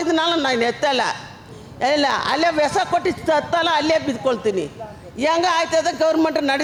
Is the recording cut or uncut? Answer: uncut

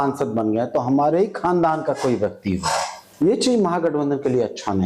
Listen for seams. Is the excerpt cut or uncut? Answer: cut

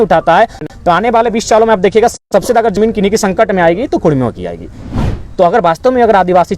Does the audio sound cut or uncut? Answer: cut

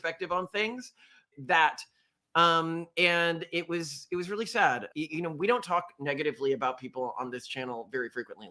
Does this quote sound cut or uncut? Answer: cut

